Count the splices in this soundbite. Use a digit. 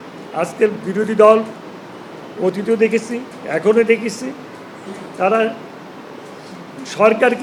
0